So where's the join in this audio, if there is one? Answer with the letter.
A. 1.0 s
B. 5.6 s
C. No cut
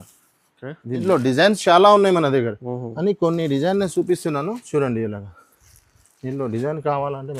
A